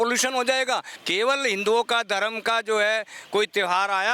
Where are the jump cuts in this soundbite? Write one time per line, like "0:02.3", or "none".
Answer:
0:00.9